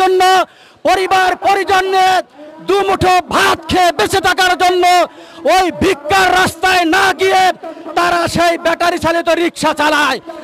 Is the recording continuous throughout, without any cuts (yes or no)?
yes